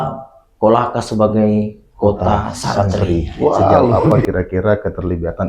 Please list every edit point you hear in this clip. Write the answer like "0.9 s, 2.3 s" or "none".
4.2 s